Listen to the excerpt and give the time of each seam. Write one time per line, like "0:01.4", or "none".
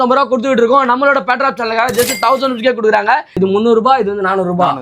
0:03.3